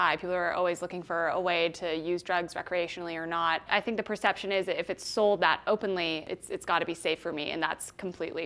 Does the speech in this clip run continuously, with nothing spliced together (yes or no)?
no